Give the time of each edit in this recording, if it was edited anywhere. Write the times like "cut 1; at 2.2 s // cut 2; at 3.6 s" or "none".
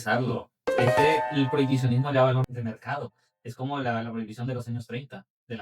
cut 1; at 2.5 s